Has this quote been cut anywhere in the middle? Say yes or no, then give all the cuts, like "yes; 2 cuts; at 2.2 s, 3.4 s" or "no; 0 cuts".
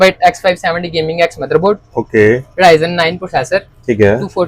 no; 0 cuts